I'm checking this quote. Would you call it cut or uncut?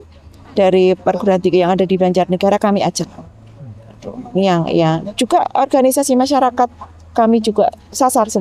uncut